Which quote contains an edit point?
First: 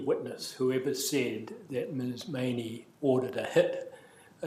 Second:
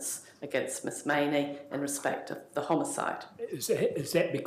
second; 1 cut; at 3.3 s

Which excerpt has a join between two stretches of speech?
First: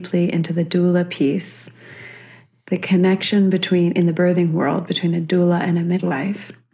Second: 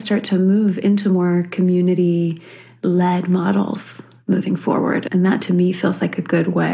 second; 1 cut; at 5.1 s

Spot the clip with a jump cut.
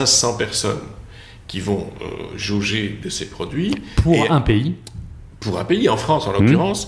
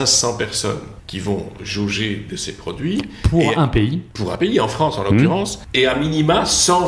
second; 4 cuts; at 1.0 s, 1.6 s, 4.3 s, 5.6 s

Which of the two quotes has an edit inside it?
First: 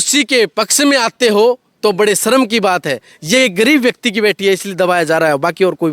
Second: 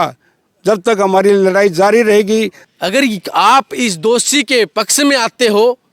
second; 1 cut; at 2.6 s

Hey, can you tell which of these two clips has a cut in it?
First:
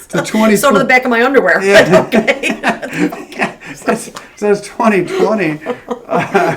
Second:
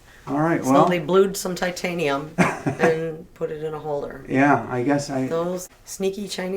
second; 1 cut; at 5.7 s

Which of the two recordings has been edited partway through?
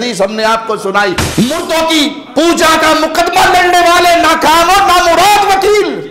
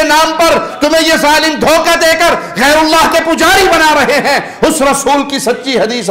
first; 1 cut; at 1.2 s

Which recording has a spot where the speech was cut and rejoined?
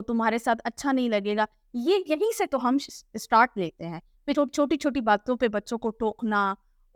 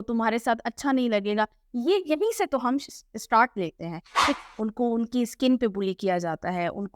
second; 1 cut; at 4.3 s

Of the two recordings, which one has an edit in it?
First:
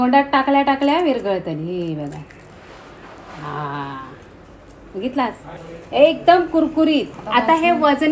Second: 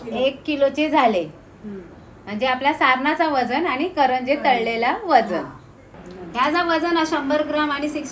first; 1 cut; at 7.2 s

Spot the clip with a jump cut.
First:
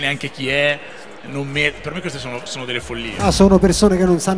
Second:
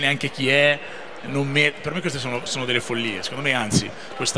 first; 1 cut; at 3.2 s

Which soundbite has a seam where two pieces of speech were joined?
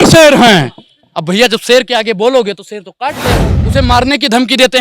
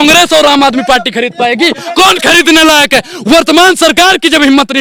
first; 1 cut; at 3.5 s

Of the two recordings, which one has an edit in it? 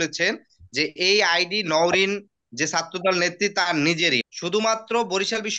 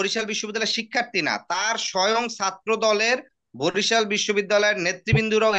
first; 1 cut; at 4.2 s

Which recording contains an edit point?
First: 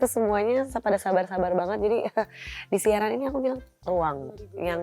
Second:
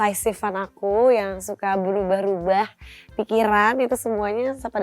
first; 1 cut; at 3.7 s

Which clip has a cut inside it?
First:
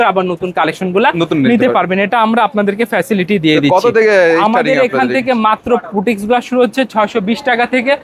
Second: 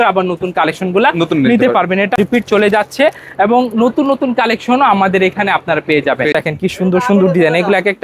second; 2 cuts; at 2.1 s, 6.3 s

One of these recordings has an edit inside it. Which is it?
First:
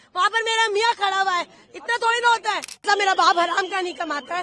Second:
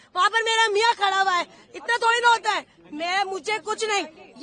first; 1 cut; at 2.9 s

